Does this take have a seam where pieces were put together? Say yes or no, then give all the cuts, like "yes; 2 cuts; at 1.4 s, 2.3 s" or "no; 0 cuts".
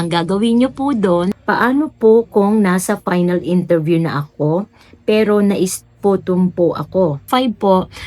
yes; 2 cuts; at 1.4 s, 7.3 s